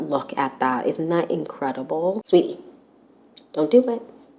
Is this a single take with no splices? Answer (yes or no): no